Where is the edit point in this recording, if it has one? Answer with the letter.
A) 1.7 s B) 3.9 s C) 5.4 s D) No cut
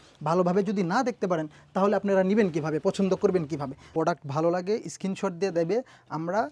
B